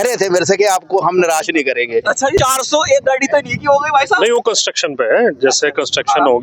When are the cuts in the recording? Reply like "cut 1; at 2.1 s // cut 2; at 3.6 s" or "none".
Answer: cut 1; at 2.4 s